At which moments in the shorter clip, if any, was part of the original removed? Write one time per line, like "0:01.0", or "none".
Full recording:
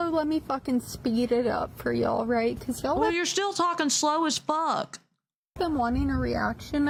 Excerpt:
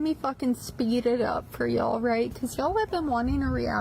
0:02.9